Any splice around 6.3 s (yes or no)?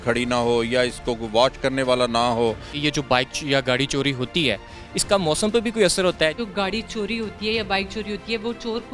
yes